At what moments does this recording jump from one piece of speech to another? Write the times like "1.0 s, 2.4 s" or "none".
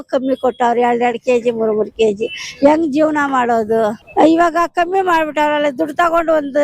4.0 s